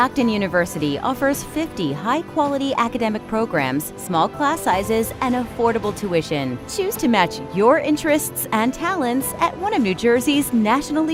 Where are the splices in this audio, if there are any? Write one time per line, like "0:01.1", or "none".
none